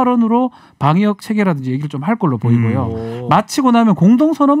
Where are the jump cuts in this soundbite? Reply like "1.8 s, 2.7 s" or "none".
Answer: none

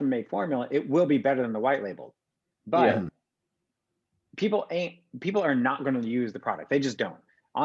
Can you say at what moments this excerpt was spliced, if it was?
none

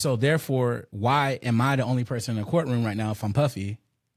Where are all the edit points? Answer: none

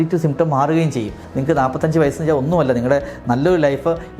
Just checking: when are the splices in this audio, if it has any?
1.2 s

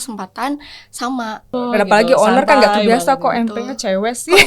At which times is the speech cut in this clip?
1.5 s

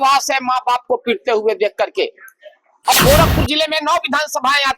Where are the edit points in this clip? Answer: 2.9 s

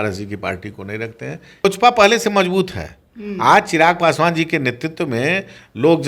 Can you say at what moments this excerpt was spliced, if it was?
1.6 s

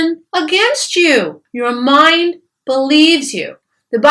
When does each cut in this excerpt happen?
1.4 s

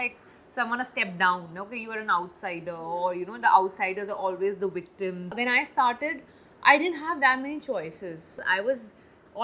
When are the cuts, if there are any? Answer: 5.3 s, 8.4 s

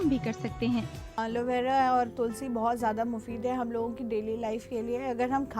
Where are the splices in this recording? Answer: 1.2 s

